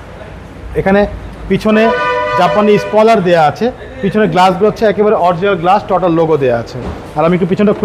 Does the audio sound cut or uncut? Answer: uncut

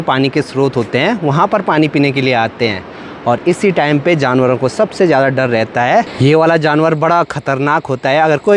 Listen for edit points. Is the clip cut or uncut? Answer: cut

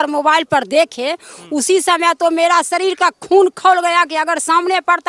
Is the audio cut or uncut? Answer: uncut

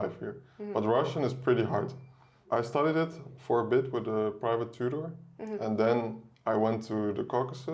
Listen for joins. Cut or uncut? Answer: uncut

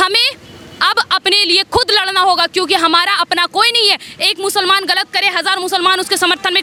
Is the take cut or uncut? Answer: uncut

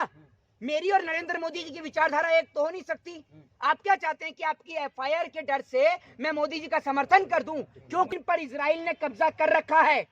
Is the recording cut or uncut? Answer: cut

